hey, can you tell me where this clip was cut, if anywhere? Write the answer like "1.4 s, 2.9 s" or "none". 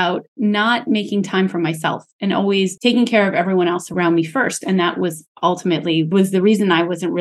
2.7 s, 3.9 s, 6.1 s